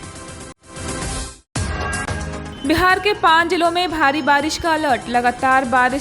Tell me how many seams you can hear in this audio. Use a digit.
0